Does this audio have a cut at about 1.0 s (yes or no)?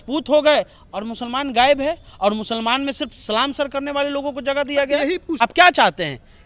no